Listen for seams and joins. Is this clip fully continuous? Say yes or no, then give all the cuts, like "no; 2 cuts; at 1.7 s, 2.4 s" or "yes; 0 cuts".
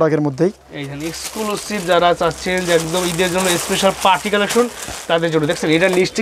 yes; 0 cuts